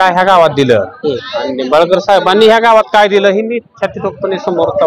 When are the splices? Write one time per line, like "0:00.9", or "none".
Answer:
none